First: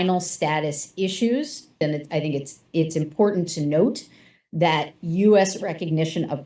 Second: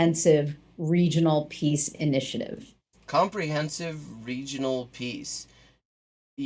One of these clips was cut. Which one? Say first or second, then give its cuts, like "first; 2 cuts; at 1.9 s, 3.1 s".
first; 1 cut; at 1.8 s